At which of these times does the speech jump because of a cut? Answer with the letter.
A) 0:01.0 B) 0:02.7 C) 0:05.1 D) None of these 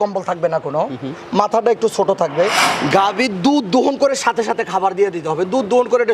B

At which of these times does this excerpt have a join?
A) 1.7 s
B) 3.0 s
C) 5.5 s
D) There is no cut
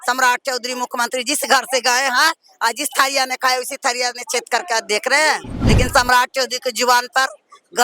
C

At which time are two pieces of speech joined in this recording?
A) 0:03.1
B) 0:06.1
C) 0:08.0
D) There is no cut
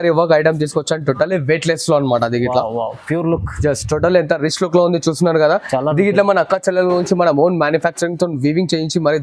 D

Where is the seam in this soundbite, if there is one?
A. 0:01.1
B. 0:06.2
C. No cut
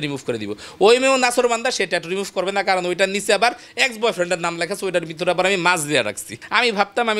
B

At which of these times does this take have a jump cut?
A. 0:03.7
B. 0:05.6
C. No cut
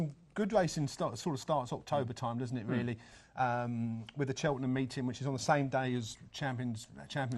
A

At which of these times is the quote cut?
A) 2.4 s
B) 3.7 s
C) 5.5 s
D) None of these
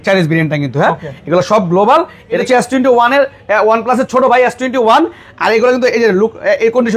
A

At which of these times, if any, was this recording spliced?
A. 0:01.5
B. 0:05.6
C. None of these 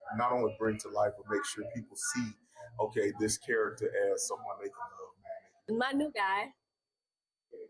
B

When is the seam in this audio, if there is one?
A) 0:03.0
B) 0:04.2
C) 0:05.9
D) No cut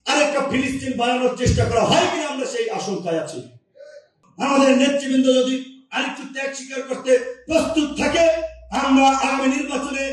B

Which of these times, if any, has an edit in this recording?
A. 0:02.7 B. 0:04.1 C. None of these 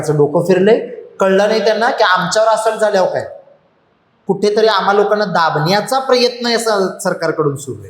B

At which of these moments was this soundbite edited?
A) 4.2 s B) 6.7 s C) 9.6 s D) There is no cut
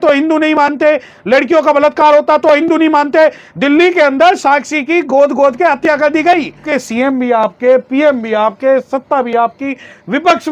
B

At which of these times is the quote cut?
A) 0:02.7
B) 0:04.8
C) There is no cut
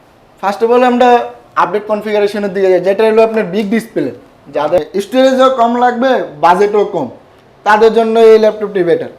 B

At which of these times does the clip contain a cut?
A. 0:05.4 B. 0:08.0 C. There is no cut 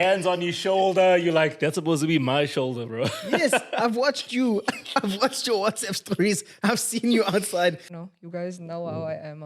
B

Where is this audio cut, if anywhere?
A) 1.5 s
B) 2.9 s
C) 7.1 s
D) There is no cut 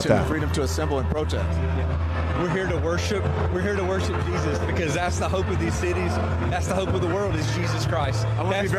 D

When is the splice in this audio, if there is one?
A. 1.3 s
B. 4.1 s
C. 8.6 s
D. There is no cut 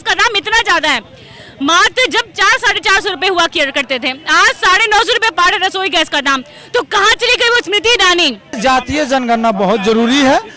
C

